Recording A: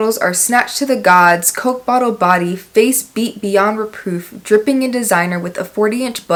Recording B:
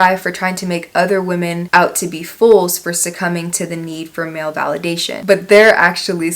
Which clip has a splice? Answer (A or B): B